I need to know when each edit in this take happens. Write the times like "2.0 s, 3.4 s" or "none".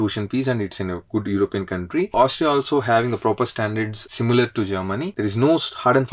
2.1 s, 5.1 s